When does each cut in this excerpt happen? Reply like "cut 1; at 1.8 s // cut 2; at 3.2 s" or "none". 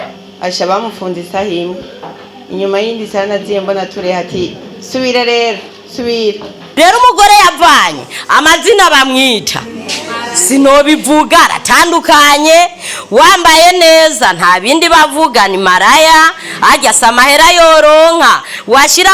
cut 1; at 6.6 s